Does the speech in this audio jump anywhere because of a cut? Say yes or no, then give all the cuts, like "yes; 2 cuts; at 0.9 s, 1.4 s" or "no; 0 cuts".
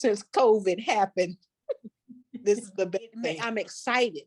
yes; 1 cut; at 3.4 s